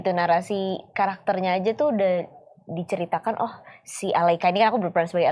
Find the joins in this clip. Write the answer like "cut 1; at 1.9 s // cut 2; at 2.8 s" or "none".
none